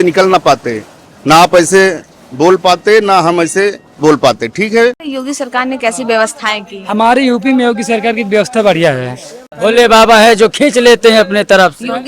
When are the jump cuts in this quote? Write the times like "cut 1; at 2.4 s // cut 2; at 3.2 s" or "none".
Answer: cut 1; at 5.1 s // cut 2; at 9.4 s